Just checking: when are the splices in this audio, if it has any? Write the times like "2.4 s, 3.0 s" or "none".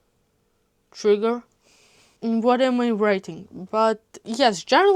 2.1 s